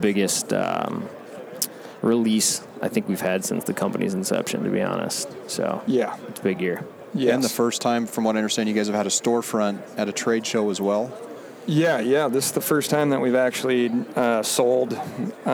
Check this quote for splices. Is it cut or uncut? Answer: uncut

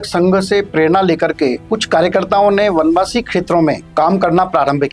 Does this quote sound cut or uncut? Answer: cut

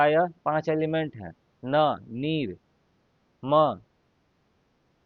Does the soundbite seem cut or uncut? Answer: uncut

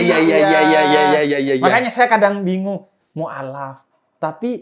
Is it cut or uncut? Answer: uncut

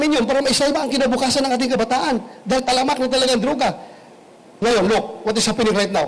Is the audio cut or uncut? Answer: uncut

